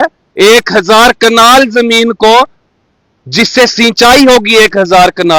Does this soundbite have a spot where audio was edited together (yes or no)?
no